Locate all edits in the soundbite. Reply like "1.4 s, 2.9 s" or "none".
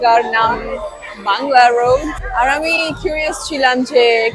2.2 s